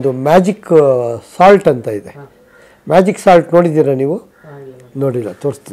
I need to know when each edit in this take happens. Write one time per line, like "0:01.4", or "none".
none

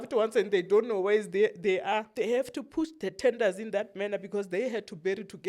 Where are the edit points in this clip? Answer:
0:02.1

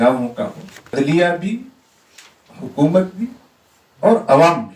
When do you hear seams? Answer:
0:00.9

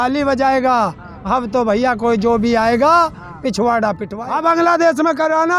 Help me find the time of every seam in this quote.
0:04.1

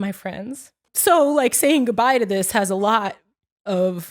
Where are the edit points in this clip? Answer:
0:00.9

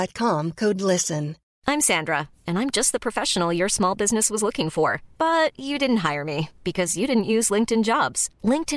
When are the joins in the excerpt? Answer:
0:01.4

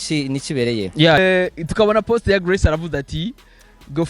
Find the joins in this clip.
0:01.2

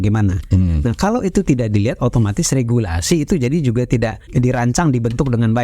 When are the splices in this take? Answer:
0:04.2

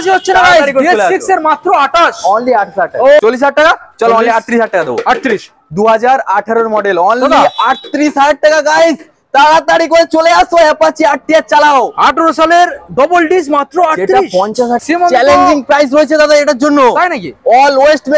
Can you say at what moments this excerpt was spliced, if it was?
0:03.2
0:14.8

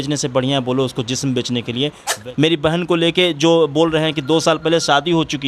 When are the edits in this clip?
0:02.1

